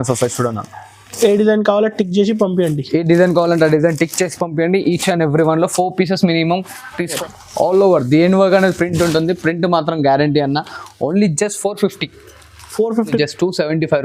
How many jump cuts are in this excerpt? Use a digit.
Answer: 2